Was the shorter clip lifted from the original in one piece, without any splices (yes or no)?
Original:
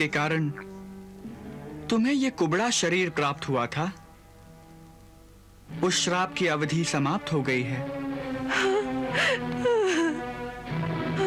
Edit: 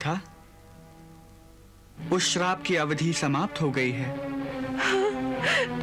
yes